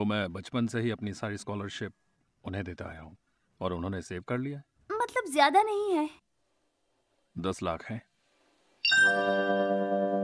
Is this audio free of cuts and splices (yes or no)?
yes